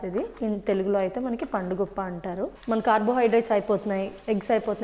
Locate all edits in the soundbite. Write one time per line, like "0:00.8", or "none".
0:02.6